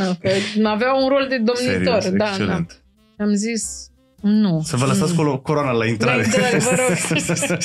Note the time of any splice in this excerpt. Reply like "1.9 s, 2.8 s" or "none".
none